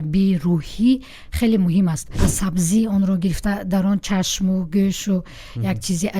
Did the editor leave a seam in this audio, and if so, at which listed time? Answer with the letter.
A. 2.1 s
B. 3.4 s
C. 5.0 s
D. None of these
A